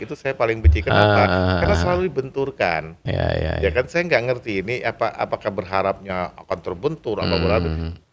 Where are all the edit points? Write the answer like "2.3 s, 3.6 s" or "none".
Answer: none